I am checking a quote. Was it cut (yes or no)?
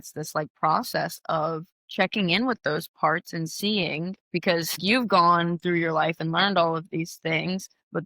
yes